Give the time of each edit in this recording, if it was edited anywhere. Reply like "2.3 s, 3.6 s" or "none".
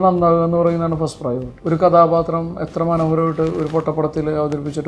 1.5 s